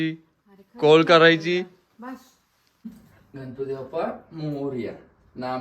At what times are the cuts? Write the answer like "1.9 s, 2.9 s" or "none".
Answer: 2.8 s